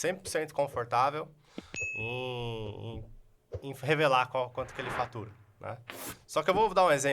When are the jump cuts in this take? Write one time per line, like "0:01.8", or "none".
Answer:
none